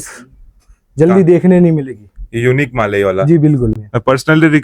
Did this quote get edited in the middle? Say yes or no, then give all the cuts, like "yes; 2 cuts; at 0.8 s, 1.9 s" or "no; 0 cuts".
yes; 1 cut; at 3.7 s